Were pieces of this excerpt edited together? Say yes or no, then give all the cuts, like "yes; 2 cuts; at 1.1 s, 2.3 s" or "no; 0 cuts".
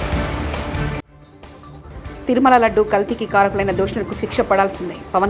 yes; 1 cut; at 1.1 s